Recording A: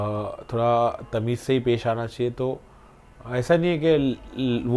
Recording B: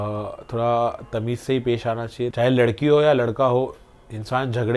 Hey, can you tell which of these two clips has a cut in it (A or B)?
B